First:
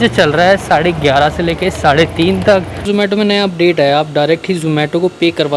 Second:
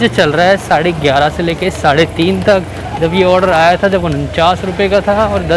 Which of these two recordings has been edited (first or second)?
first